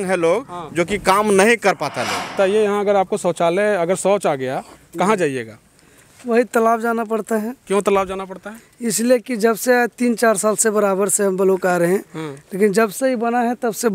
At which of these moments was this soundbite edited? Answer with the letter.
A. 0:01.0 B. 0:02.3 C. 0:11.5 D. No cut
B